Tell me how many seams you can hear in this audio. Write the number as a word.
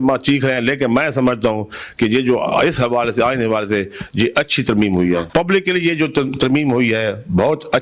one